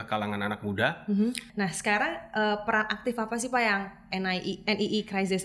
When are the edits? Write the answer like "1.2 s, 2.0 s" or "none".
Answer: 1.4 s